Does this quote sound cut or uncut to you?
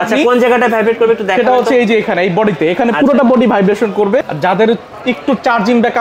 cut